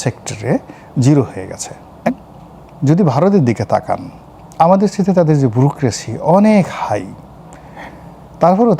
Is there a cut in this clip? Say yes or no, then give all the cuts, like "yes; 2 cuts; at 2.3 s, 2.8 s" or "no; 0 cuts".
yes; 1 cut; at 2.1 s